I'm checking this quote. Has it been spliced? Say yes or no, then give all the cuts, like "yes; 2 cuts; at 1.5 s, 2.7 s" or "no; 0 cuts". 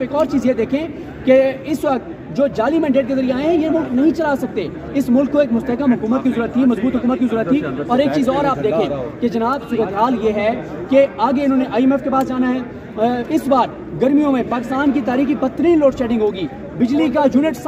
no; 0 cuts